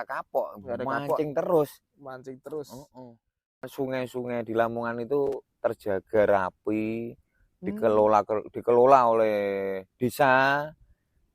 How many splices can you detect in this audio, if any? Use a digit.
1